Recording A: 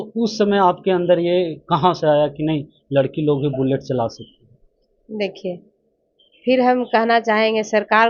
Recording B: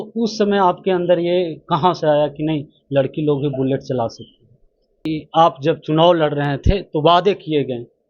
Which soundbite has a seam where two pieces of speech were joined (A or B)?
B